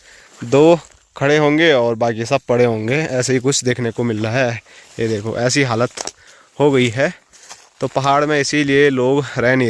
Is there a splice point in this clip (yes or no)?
no